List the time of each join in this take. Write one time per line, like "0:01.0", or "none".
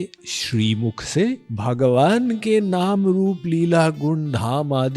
0:01.5